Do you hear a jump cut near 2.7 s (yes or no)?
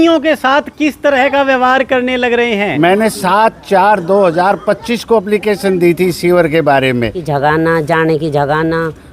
yes